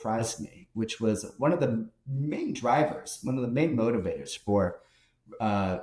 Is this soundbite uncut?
yes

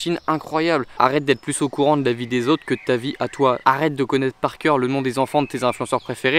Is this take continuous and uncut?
no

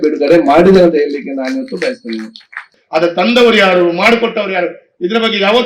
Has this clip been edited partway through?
yes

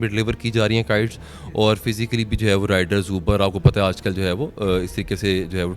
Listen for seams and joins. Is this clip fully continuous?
yes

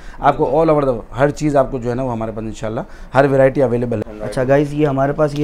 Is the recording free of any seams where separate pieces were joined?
no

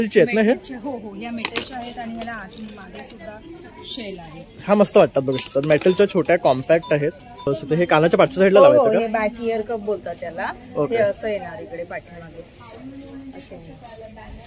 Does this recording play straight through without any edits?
no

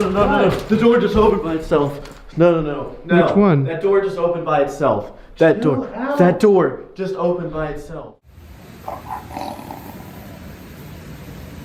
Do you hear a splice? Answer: yes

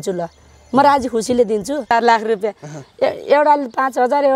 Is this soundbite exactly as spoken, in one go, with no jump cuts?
no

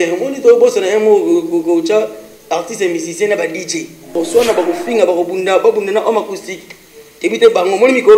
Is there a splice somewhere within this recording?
yes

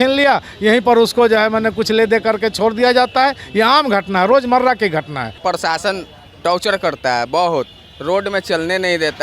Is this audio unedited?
no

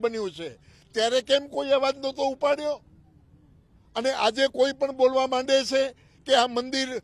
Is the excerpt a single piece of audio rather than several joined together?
yes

